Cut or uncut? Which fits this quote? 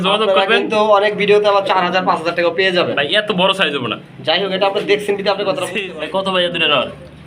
cut